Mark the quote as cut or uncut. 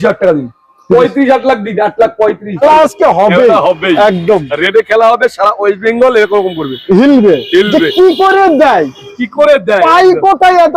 cut